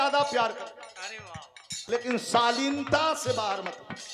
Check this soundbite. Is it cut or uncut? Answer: cut